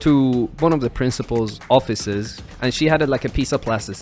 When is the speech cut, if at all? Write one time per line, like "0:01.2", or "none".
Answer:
0:01.6
0:02.4

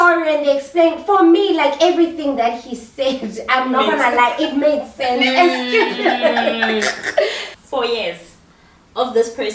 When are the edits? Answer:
0:07.5

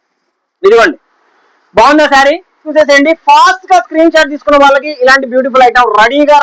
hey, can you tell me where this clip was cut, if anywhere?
0:02.7

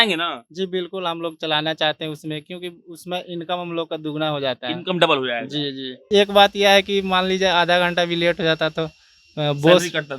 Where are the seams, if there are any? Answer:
0:06.1

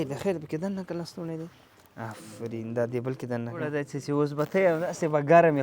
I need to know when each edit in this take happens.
0:03.7

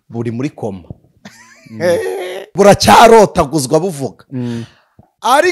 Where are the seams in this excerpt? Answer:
0:02.5

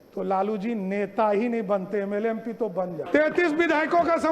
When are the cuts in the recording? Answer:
0:03.0

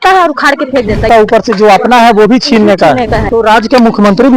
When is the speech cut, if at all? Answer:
0:01.1
0:03.2

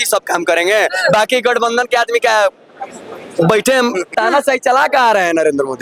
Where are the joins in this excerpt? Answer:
0:04.1

